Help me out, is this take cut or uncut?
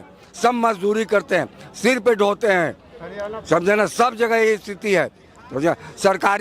uncut